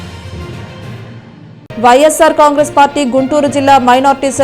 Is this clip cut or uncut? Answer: cut